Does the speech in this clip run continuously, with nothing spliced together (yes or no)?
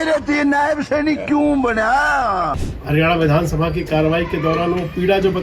no